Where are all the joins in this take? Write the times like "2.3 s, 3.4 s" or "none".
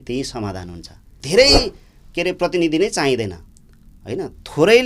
1.2 s